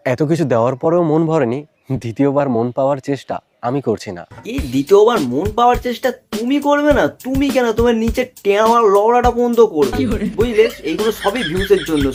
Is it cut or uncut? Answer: uncut